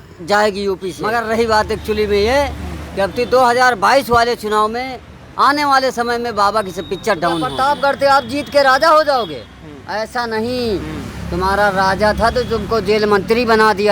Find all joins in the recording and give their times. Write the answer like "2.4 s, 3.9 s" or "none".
1.0 s, 7.5 s

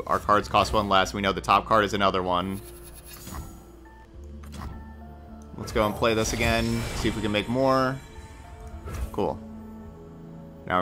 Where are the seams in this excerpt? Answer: 4.0 s

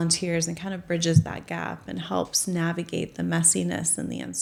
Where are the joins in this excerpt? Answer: none

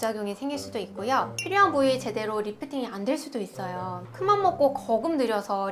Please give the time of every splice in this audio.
none

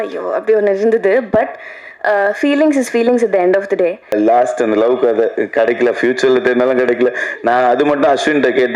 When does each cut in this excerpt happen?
4.1 s

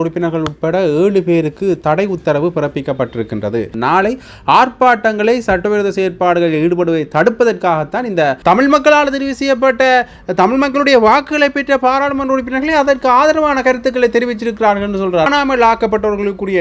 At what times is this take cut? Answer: 3.7 s, 8.4 s, 15.3 s

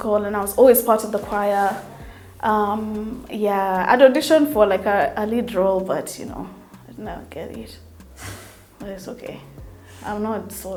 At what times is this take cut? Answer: none

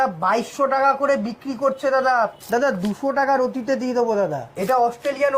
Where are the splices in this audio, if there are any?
2.4 s, 4.4 s

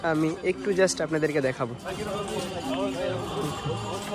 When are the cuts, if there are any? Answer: 1.8 s

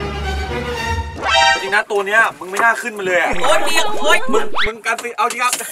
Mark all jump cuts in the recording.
none

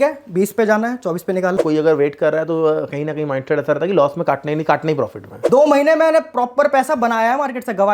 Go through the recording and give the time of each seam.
1.6 s, 5.4 s

